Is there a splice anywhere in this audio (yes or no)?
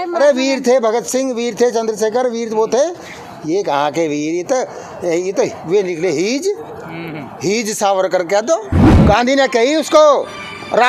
yes